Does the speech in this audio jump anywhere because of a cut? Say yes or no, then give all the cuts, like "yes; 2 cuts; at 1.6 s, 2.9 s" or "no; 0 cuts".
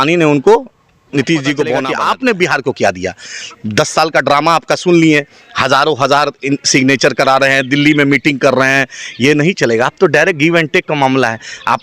yes; 1 cut; at 1.9 s